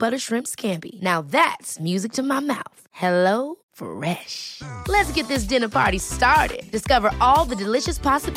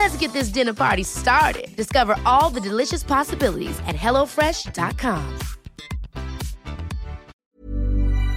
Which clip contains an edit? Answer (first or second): second